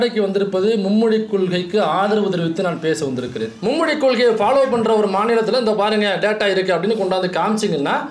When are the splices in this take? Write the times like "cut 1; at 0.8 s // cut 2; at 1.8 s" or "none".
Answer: cut 1; at 3.4 s